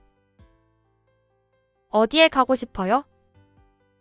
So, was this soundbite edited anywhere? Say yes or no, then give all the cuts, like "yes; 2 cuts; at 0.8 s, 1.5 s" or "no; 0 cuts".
yes; 1 cut; at 3.1 s